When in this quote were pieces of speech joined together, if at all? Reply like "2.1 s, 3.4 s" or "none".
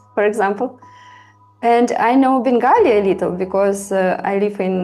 none